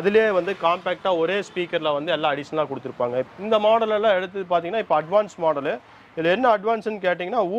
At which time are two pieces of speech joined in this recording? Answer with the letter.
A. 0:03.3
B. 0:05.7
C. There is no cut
A